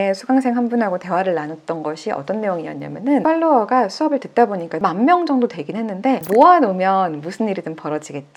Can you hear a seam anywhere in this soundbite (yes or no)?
yes